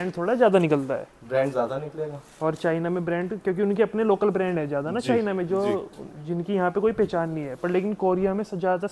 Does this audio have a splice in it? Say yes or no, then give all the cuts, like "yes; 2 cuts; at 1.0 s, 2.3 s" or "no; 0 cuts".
no; 0 cuts